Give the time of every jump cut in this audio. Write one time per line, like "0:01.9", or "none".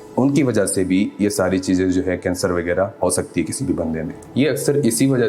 0:04.2